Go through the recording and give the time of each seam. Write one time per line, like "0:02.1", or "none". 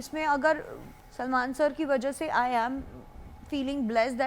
none